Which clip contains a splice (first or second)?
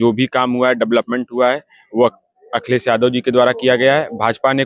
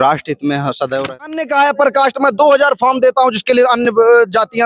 second